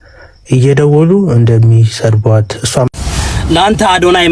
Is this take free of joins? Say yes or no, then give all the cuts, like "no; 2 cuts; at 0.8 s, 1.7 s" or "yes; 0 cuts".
no; 1 cut; at 2.9 s